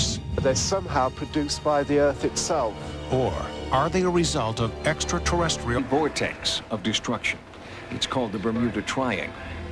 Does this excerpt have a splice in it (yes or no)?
no